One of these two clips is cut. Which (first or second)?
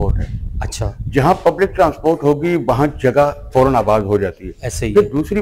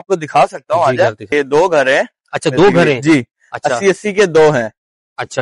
second